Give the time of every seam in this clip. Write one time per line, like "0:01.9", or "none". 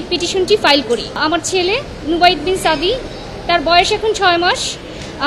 0:01.2